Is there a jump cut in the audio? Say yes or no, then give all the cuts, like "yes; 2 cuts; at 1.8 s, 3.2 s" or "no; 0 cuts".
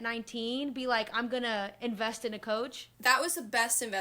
yes; 1 cut; at 3.1 s